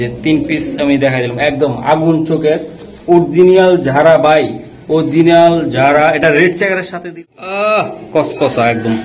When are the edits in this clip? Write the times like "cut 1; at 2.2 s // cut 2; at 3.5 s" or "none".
cut 1; at 7.0 s